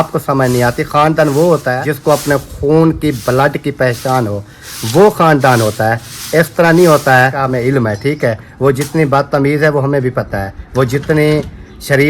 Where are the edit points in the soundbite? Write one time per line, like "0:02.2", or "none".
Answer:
0:01.8
0:07.4

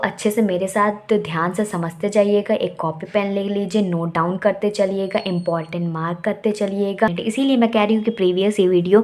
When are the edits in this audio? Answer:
0:07.1

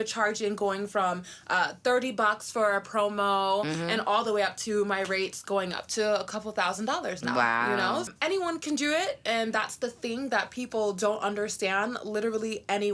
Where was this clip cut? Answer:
none

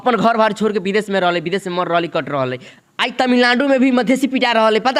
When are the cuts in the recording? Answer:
none

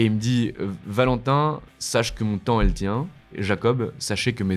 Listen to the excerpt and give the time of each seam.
0:03.4

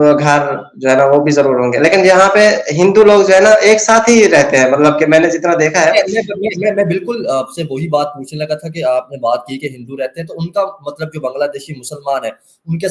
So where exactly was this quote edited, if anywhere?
none

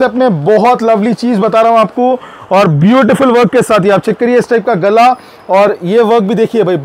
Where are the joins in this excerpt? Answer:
none

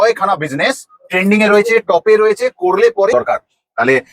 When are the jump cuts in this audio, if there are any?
0:03.1

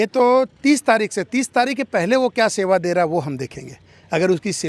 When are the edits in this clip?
none

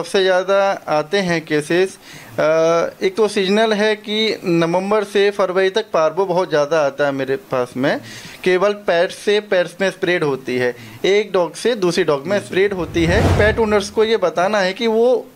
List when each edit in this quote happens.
0:08.2
0:13.3

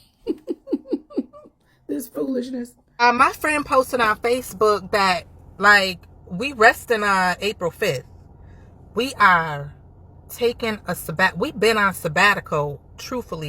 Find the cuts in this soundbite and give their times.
0:02.8

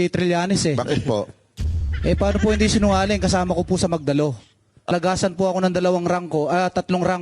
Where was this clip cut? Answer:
0:04.9

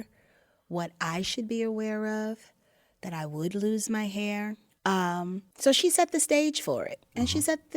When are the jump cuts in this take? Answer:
0:04.6

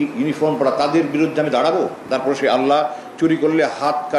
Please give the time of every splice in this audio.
0:02.0

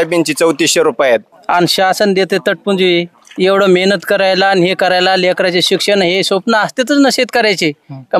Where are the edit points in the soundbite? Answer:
0:01.3

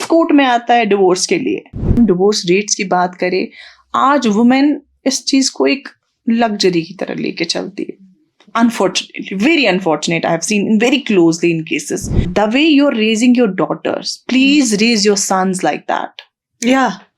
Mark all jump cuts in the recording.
0:02.0
0:12.2

